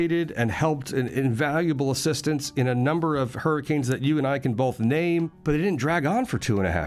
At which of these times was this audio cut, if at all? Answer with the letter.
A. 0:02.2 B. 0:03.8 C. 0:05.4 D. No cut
D